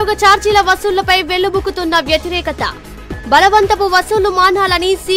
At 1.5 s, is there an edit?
no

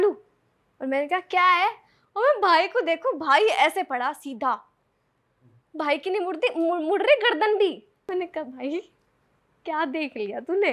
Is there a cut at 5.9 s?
no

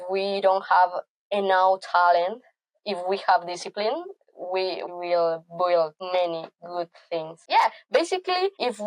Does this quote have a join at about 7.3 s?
yes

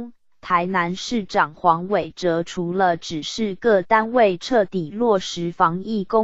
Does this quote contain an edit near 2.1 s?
no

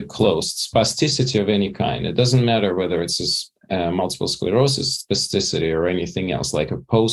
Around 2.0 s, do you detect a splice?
no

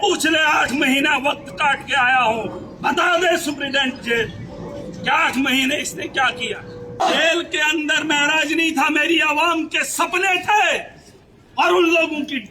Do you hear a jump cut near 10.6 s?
no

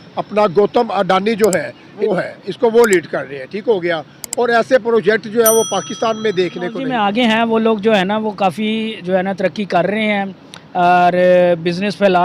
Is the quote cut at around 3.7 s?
no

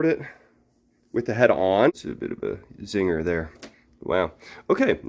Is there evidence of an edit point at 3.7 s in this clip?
no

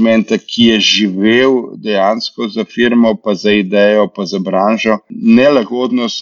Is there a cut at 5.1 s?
yes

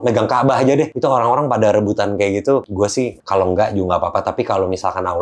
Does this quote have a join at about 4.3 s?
no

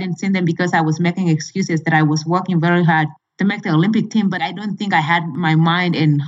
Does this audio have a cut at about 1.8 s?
no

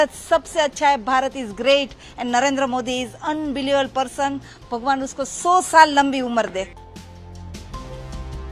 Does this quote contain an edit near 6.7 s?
yes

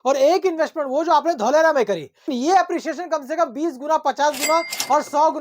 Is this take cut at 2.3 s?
yes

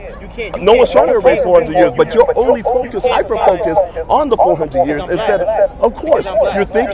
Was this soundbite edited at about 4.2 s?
no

